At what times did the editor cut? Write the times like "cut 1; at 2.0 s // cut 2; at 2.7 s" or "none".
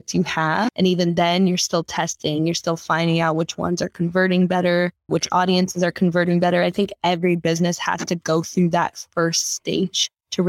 cut 1; at 5.1 s